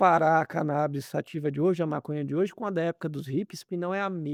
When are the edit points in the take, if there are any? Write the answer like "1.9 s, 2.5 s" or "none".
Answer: none

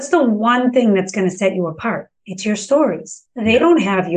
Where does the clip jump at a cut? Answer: none

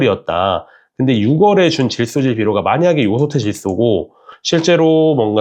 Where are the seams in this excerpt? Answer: none

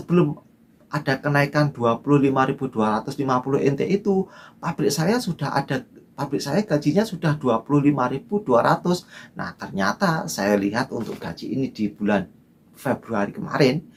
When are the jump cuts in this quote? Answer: none

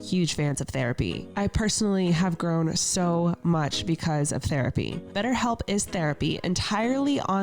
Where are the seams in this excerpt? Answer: 5.0 s

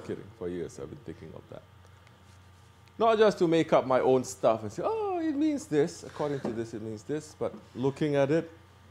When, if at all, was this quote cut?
7.7 s

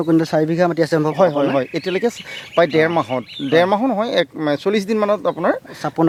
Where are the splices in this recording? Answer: none

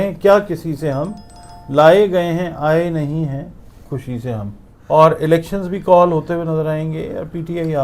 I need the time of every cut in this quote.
4.7 s

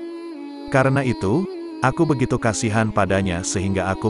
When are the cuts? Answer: none

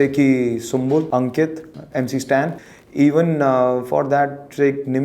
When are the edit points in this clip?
1.1 s, 2.6 s

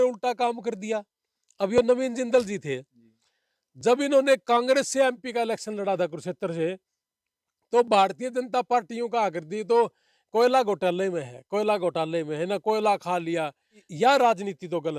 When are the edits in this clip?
13.9 s

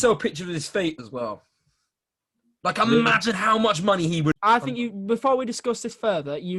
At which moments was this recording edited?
4.3 s

